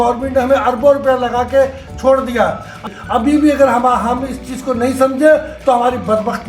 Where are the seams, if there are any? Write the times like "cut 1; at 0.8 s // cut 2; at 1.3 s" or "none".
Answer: cut 1; at 2.8 s